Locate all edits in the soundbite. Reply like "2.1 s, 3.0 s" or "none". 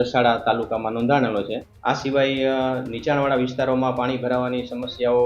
1.6 s